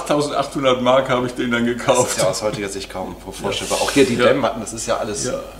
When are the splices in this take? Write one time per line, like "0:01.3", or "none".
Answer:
none